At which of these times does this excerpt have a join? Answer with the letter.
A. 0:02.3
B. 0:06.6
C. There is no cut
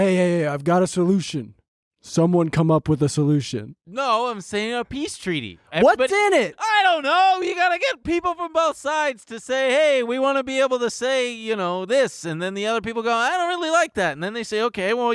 C